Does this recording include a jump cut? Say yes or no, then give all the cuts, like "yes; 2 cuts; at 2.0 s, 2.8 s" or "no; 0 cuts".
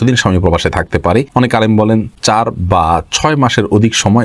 yes; 2 cuts; at 1.3 s, 2.1 s